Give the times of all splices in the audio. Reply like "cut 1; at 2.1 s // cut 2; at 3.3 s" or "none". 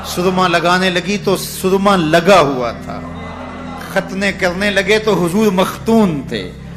none